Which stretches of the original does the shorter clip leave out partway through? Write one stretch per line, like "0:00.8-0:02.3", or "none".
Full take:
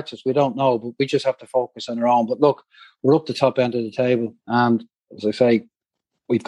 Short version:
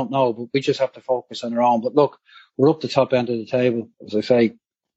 0:04.4-0:05.0